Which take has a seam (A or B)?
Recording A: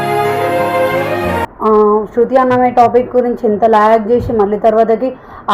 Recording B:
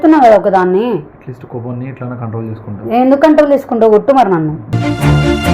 A